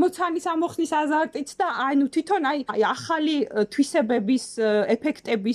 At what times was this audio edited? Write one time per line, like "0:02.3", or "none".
0:02.7